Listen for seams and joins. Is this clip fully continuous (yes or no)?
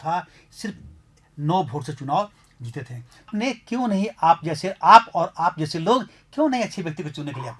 no